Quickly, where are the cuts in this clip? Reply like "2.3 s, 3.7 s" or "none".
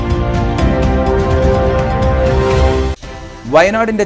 3.0 s